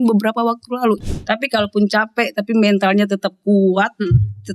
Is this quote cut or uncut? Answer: cut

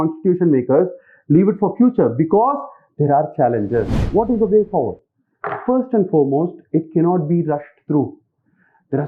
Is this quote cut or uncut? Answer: cut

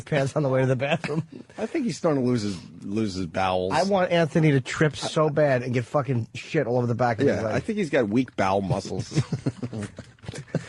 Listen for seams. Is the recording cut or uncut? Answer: cut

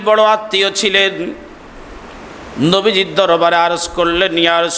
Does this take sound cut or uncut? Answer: uncut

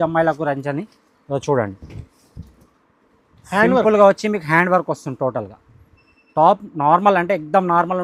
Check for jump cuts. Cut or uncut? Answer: uncut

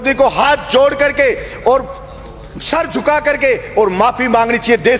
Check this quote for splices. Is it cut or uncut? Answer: uncut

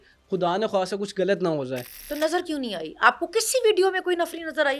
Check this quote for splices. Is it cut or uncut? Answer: uncut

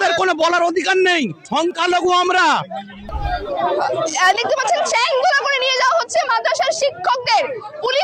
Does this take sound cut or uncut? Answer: cut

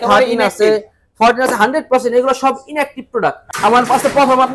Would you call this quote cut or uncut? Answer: cut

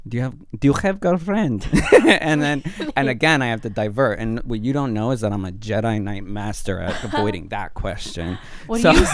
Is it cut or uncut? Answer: uncut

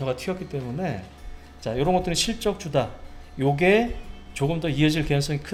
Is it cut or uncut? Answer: uncut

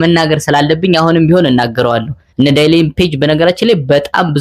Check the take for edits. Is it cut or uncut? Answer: cut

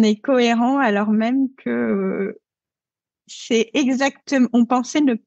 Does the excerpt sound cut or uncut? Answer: uncut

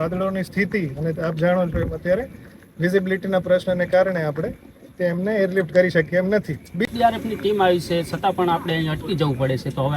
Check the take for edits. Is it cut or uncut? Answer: cut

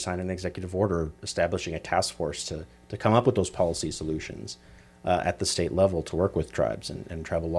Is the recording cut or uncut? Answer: uncut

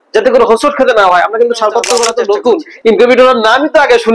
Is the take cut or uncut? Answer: cut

